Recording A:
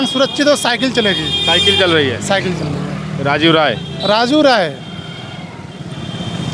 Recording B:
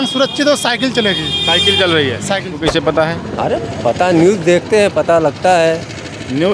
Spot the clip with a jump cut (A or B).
B